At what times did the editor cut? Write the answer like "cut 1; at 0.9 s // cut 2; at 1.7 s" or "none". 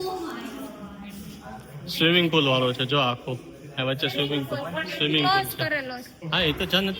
none